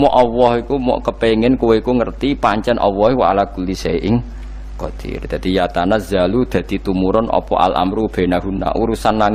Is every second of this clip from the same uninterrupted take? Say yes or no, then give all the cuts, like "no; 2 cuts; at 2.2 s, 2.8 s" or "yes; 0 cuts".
yes; 0 cuts